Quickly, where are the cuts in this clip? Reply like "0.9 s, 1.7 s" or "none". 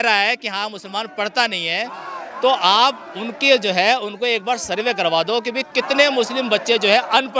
none